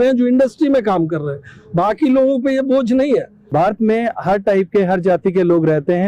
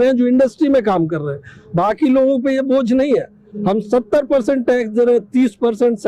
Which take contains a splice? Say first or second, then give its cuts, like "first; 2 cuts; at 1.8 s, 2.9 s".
first; 1 cut; at 3.4 s